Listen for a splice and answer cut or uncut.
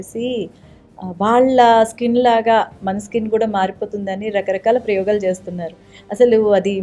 uncut